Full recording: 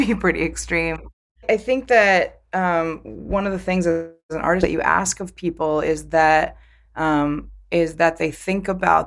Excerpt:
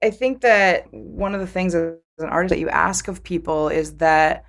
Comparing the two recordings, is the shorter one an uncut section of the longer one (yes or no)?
no